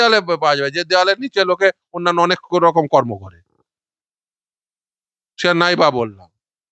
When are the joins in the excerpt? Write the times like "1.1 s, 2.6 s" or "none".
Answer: none